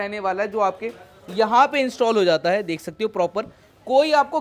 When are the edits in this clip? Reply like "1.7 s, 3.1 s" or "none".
none